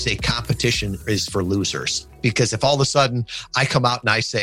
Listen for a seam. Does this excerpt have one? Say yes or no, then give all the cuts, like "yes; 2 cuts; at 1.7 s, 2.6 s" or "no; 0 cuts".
yes; 2 cuts; at 1.0 s, 2.2 s